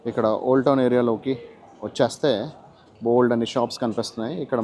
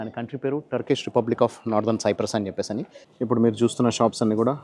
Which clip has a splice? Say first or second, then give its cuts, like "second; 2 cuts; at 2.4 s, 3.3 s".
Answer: second; 1 cut; at 3.0 s